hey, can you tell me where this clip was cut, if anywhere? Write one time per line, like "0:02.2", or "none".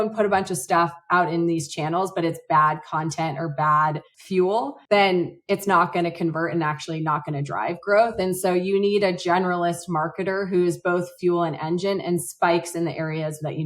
0:04.8

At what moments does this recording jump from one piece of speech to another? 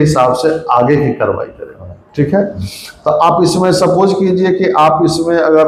none

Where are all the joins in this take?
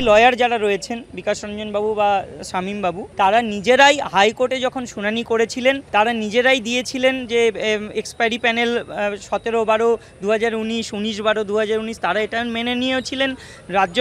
0:03.0
0:05.8

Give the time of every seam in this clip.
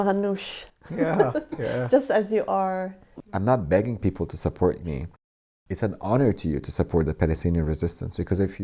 0:03.1

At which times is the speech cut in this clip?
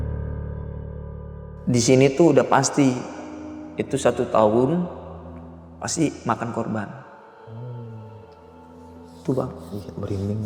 0:01.5

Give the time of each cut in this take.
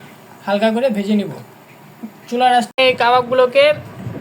0:02.7

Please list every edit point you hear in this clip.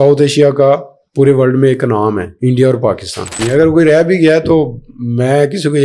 0:02.3
0:03.4

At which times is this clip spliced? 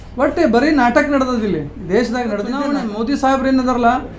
0:02.6

